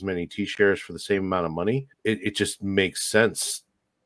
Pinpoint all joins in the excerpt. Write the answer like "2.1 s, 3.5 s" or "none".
1.9 s